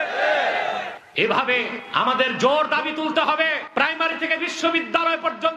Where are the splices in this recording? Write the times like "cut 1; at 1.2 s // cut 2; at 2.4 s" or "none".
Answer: cut 1; at 1.0 s // cut 2; at 1.8 s // cut 3; at 3.6 s